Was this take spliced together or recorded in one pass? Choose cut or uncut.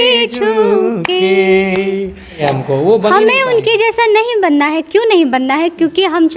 cut